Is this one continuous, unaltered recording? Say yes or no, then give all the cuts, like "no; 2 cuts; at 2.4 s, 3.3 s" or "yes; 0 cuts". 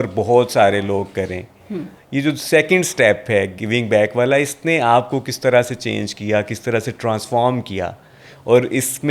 yes; 0 cuts